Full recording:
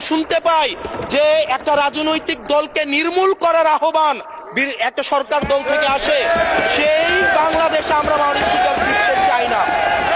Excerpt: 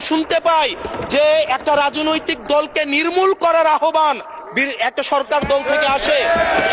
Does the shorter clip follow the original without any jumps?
yes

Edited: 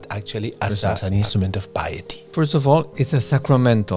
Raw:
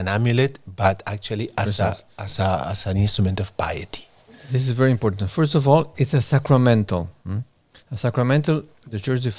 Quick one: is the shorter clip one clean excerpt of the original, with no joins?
no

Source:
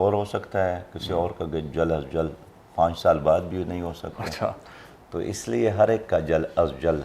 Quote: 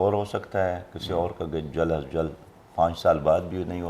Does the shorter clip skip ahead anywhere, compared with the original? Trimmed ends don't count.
no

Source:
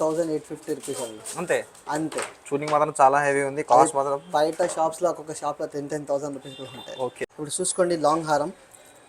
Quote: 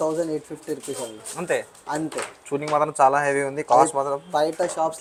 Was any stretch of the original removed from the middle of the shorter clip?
no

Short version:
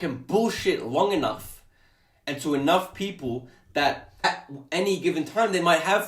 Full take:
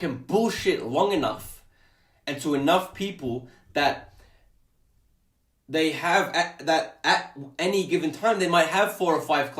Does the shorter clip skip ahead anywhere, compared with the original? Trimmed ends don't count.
yes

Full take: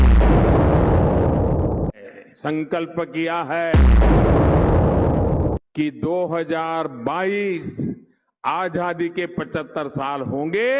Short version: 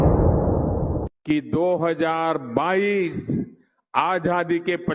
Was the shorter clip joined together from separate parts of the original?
yes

